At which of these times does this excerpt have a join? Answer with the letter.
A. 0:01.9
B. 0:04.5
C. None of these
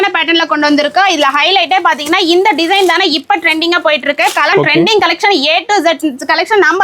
B